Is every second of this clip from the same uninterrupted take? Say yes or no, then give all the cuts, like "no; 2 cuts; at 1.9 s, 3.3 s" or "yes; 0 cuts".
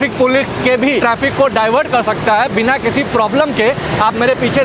no; 1 cut; at 1.0 s